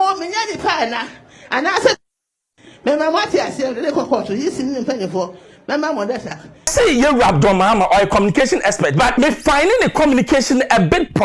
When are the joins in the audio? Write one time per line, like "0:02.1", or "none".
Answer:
0:06.7
0:09.1